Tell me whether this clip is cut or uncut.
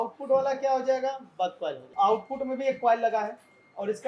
cut